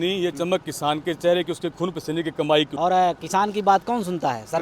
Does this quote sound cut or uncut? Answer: cut